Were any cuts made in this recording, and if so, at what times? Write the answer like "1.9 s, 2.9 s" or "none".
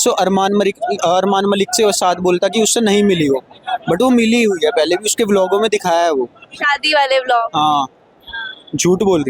none